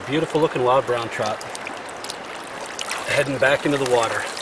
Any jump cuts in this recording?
no; 0 cuts

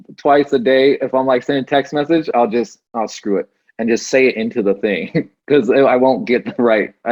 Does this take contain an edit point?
no; 0 cuts

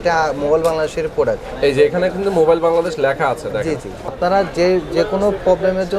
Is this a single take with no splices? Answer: no; 1 cut; at 4.0 s

